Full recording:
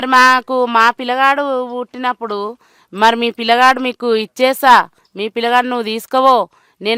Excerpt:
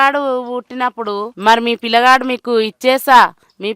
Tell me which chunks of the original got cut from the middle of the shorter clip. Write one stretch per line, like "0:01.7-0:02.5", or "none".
0:02.5-0:02.9